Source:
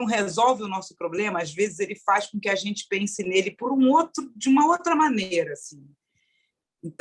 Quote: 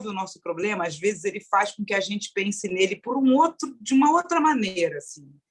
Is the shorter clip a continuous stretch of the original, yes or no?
yes